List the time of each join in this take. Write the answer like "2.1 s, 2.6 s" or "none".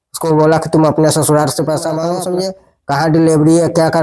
2.2 s